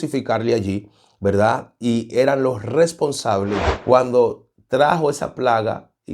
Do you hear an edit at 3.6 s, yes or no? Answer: yes